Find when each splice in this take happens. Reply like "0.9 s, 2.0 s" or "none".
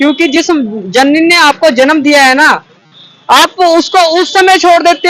none

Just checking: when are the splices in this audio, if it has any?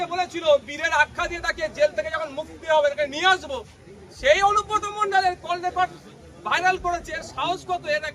none

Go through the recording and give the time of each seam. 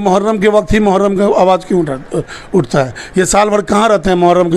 none

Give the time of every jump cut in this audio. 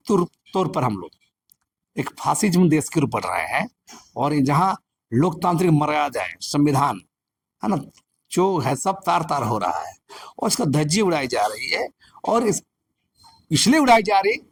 none

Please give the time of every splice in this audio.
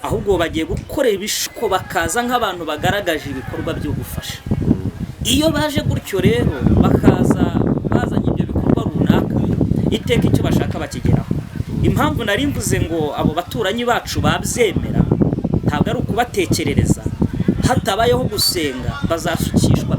1.5 s

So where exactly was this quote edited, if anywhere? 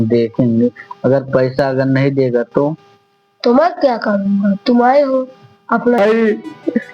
6.0 s

